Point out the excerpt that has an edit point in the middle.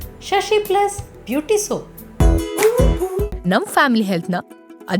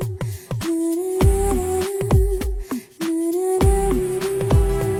first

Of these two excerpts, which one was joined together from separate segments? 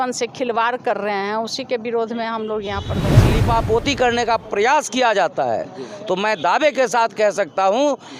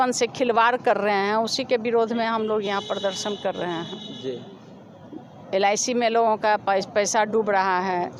first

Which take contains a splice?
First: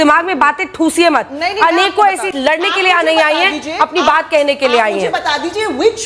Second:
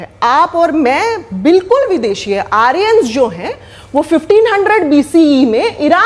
first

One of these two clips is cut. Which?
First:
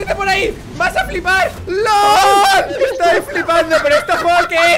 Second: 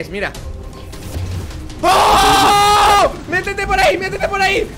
first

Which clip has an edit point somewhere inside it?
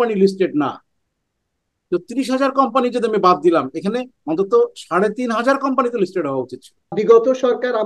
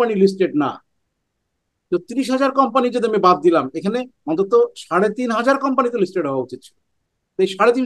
first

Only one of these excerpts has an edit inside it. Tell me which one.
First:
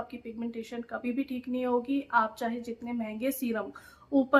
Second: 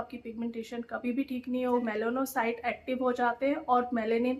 second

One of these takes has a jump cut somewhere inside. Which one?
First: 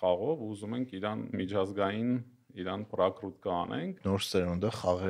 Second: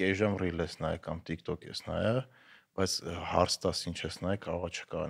first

